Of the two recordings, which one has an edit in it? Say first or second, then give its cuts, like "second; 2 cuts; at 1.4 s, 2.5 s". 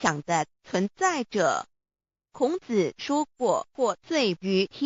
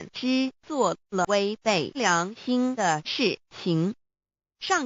second; 1 cut; at 1.2 s